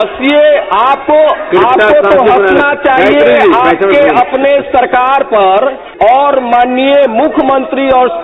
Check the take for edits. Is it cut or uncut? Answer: cut